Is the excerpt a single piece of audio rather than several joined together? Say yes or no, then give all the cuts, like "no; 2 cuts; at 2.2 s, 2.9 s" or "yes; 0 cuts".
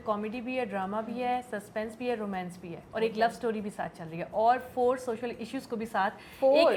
yes; 0 cuts